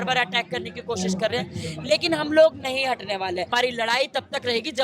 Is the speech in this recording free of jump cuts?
no; 1 cut; at 3.5 s

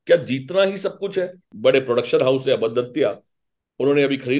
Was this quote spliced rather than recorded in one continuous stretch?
yes; 1 cut; at 1.5 s

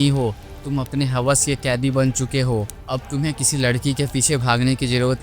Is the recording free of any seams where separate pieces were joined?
no; 1 cut; at 2.8 s

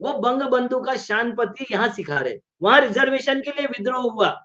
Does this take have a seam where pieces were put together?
yes; 1 cut; at 2.5 s

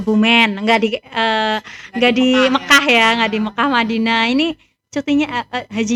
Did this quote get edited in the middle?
no; 0 cuts

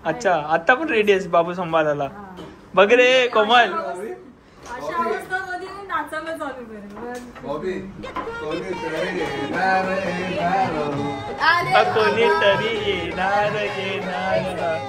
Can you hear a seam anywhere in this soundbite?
no; 0 cuts

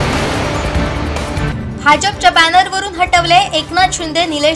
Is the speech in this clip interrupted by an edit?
yes; 1 cut; at 1.5 s

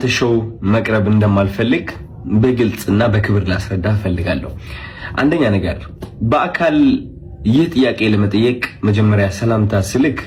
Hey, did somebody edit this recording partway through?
no; 0 cuts

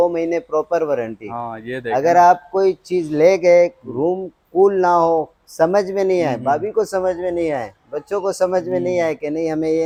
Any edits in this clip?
no; 0 cuts

